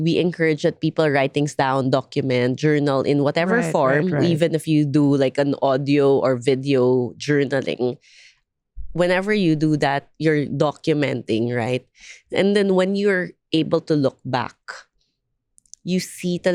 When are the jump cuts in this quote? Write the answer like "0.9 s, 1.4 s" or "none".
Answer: none